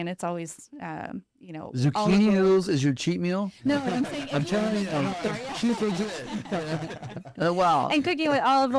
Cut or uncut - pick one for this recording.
uncut